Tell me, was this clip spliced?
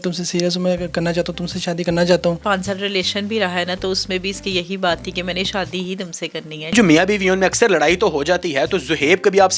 yes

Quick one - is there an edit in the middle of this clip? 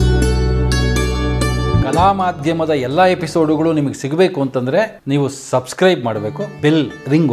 no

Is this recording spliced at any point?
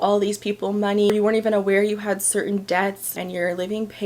yes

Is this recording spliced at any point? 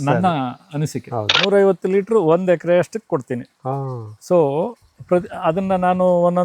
yes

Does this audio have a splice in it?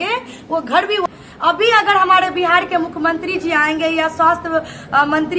yes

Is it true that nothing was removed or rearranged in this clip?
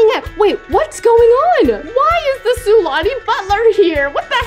yes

